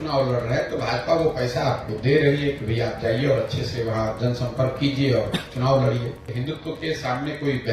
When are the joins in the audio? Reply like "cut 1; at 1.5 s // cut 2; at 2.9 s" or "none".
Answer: cut 1; at 6.3 s